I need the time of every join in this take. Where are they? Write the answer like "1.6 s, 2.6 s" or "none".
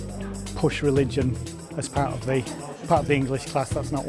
none